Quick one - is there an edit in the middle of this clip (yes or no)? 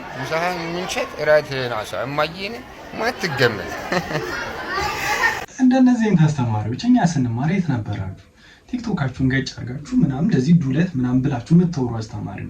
no